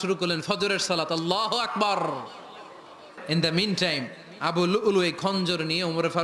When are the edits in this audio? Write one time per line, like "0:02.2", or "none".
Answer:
0:03.2